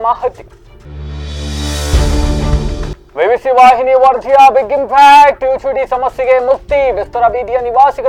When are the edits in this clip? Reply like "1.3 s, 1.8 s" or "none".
none